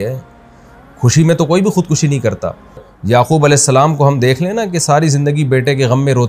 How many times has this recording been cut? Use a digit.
1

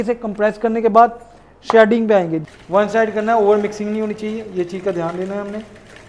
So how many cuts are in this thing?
1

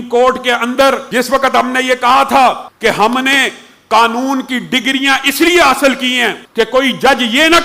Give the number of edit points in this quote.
3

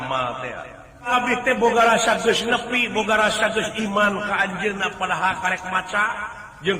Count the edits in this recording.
1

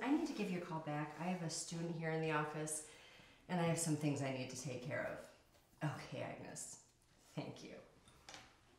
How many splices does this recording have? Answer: 1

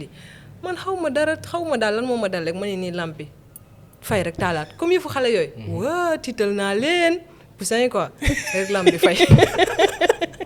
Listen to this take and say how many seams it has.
0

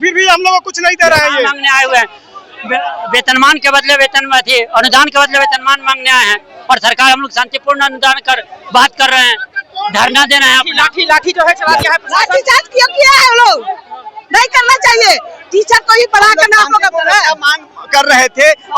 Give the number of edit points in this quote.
2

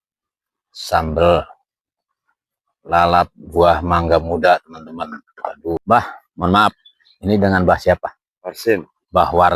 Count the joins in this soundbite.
1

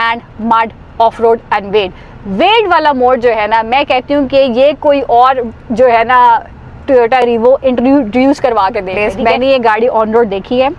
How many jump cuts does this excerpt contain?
1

